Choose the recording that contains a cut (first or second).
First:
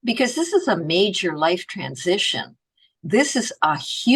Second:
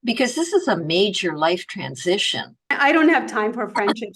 second